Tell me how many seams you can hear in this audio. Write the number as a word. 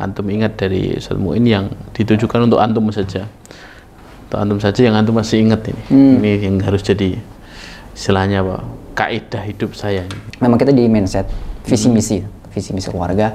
one